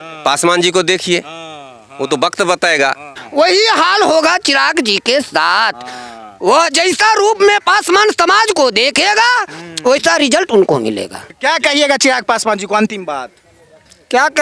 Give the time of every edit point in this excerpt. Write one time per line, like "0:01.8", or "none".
0:03.2
0:11.2